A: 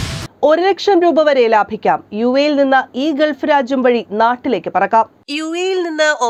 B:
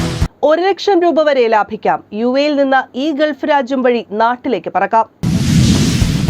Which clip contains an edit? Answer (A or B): B